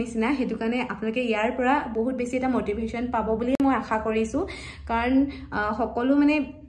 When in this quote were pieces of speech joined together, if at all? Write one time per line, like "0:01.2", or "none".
none